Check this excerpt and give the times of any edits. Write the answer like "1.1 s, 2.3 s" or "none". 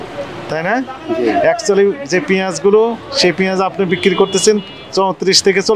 none